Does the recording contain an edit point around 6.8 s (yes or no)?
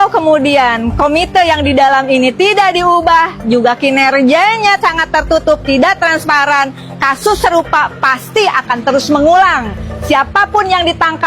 no